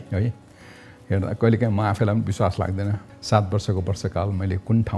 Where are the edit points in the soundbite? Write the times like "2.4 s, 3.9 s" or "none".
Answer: 3.0 s